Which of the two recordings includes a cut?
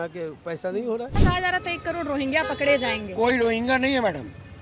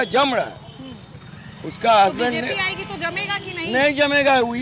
first; 1 cut; at 1.1 s

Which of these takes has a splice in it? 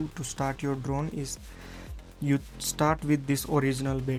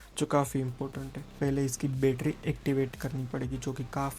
second; 1 cut; at 1.4 s

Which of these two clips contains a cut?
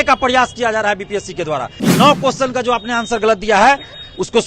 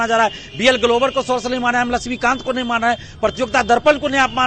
first; 1 cut; at 1.8 s

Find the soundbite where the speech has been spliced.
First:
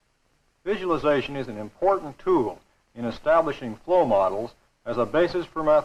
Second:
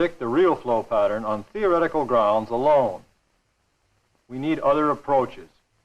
second; 1 cut; at 4.6 s

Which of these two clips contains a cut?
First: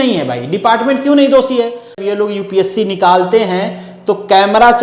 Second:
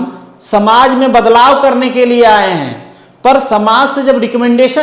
first; 1 cut; at 2.0 s

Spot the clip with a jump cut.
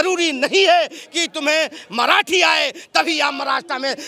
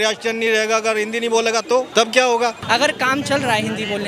second; 2 cuts; at 1.9 s, 2.6 s

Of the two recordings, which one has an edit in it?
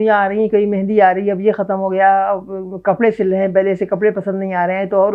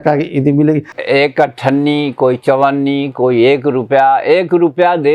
second; 1 cut; at 0.9 s

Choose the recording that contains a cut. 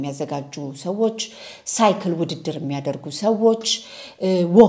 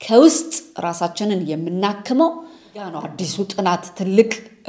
second; 1 cut; at 2.9 s

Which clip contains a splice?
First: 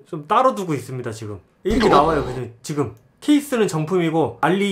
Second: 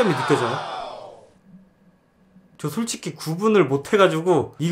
first; 1 cut; at 1.6 s

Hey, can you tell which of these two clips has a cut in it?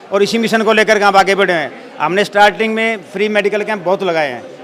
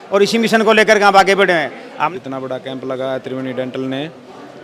second; 1 cut; at 2.1 s

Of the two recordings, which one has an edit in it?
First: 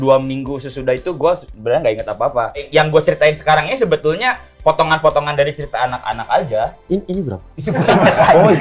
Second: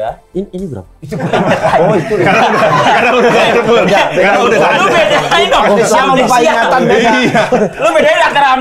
first; 1 cut; at 2.7 s

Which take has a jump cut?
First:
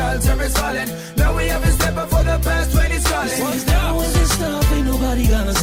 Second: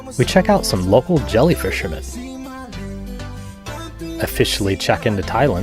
second; 1 cut; at 2.5 s

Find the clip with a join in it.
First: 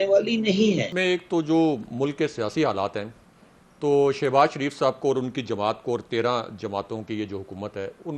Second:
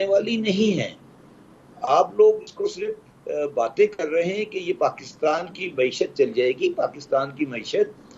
first; 1 cut; at 0.9 s

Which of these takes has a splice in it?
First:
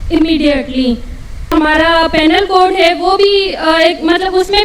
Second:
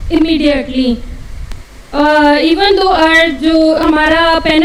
first; 1 cut; at 1.5 s

